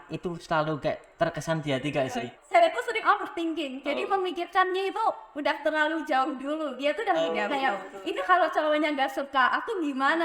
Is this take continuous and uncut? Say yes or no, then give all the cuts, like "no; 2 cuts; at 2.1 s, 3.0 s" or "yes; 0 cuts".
no; 1 cut; at 2.3 s